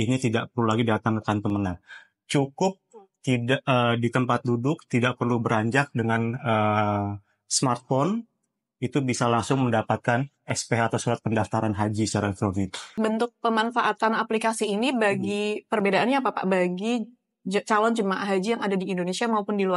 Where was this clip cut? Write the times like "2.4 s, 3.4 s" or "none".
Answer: 12.9 s